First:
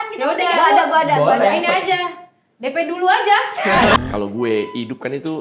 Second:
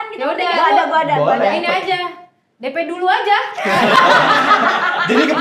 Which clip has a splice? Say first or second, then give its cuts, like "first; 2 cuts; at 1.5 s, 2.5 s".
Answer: first; 1 cut; at 4.0 s